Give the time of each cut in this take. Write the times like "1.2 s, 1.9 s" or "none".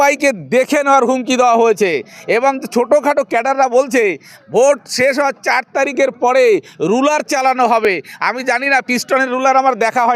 none